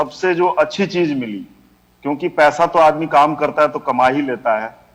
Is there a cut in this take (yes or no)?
no